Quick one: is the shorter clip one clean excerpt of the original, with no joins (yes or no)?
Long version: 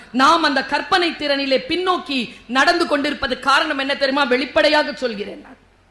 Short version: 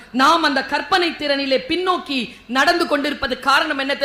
yes